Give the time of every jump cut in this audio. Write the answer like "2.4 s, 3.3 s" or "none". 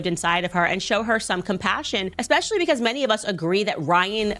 2.1 s